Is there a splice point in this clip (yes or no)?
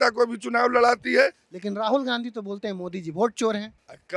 yes